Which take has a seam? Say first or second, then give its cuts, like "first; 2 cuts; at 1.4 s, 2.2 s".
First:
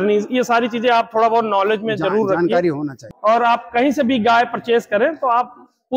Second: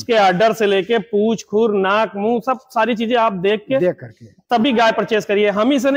first; 1 cut; at 3.0 s